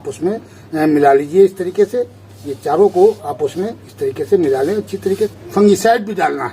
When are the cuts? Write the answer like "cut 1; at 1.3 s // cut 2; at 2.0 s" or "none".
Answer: cut 1; at 5.3 s